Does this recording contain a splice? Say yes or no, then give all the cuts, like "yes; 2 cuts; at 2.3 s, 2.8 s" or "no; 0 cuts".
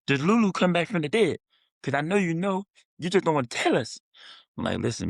no; 0 cuts